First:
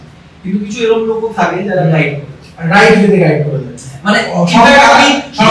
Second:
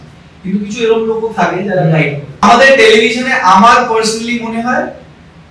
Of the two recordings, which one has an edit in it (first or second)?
second